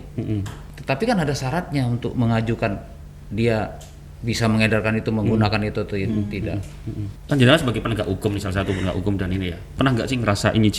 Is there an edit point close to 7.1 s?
yes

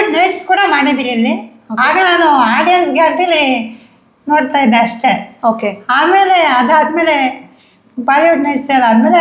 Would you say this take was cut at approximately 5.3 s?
no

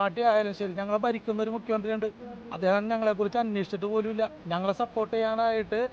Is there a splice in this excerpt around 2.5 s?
no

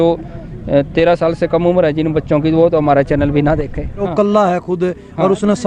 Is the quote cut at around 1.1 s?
no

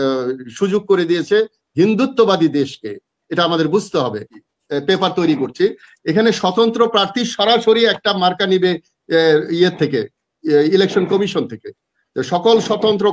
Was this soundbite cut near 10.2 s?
no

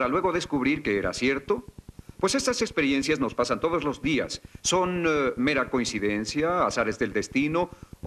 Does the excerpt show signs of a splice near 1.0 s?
no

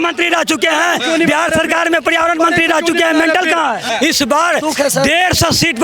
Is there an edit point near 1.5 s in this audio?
no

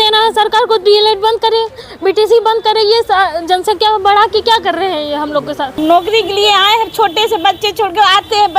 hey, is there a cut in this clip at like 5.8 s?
yes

